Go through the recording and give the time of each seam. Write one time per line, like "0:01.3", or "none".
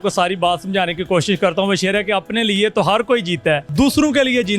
0:03.7